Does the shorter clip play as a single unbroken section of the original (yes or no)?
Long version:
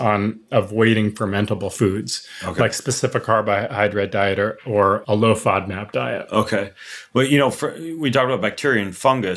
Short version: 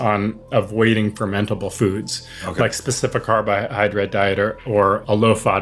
yes